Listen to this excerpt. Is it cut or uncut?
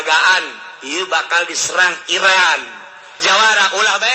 cut